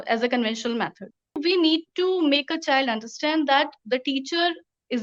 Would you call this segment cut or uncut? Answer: cut